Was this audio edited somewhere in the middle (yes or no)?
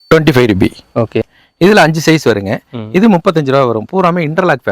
yes